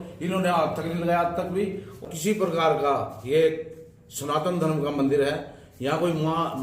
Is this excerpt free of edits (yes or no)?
no